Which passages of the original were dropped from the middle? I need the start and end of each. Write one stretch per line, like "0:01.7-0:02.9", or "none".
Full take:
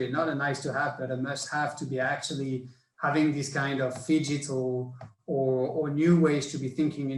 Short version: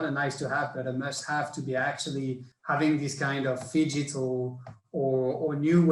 0:02.7-0:02.8